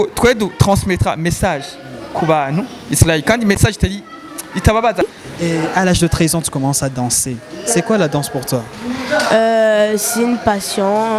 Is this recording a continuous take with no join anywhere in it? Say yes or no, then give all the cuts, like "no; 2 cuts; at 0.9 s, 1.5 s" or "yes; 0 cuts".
no; 1 cut; at 5.0 s